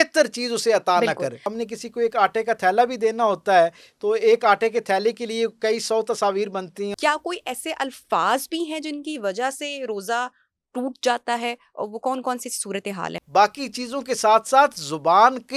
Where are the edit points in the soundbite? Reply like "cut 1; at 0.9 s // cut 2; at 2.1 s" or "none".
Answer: cut 1; at 1.5 s // cut 2; at 6.9 s // cut 3; at 13.2 s